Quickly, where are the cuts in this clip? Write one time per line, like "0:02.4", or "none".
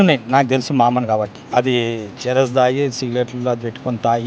0:01.4